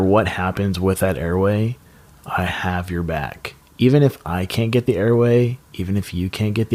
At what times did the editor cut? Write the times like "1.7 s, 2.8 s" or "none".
none